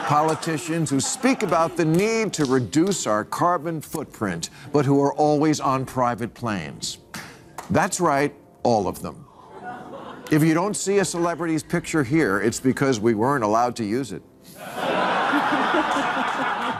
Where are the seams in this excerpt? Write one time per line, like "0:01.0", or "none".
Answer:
none